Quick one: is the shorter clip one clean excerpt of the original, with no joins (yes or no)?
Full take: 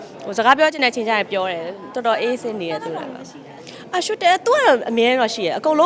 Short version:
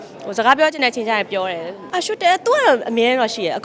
no